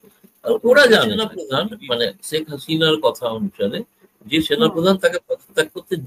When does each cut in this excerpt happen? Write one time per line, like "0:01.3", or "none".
0:01.4